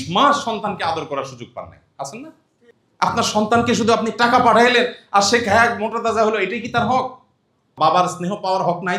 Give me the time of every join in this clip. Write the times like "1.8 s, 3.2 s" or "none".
none